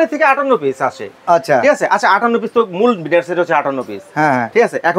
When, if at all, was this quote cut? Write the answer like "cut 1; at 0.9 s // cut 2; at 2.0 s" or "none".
none